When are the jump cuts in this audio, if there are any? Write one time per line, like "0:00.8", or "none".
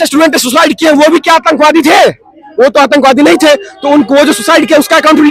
none